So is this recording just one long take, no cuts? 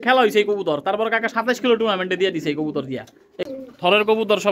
no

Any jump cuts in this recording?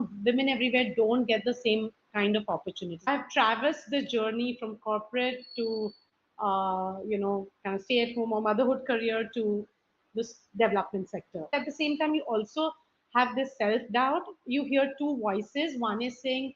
yes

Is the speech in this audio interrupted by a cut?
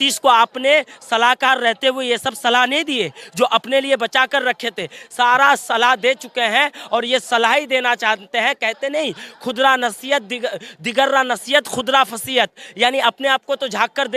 no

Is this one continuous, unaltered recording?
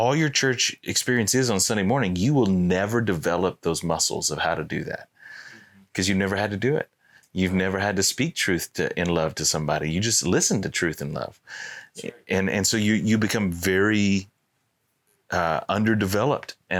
yes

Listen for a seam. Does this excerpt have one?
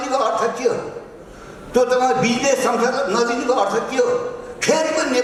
no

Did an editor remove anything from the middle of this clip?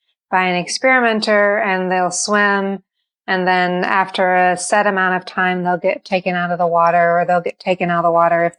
no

